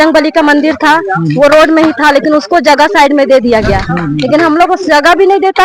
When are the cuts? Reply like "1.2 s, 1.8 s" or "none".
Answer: none